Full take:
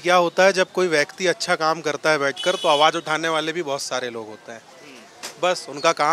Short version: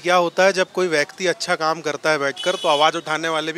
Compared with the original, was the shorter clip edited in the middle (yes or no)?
no